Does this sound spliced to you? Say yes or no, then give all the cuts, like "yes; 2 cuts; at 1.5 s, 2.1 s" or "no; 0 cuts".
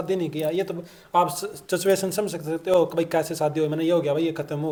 no; 0 cuts